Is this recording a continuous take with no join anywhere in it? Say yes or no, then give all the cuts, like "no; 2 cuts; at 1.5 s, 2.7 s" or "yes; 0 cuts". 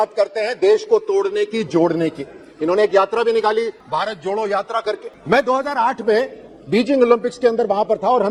yes; 0 cuts